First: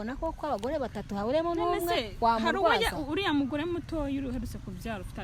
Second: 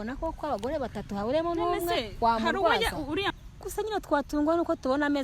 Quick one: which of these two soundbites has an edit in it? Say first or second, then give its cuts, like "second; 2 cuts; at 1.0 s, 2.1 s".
second; 1 cut; at 3.3 s